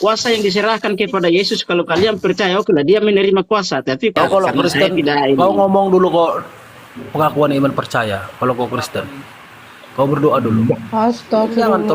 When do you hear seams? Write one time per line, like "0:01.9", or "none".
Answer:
0:04.2